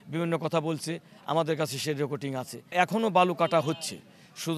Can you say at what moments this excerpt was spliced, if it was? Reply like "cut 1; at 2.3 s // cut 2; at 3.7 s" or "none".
cut 1; at 2.7 s